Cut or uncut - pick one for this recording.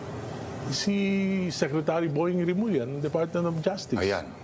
uncut